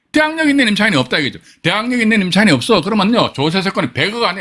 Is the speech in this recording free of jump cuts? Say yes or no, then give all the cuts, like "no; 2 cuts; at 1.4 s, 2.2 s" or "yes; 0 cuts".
yes; 0 cuts